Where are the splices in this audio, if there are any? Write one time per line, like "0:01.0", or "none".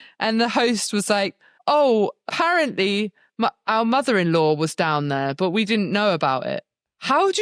0:01.5
0:02.3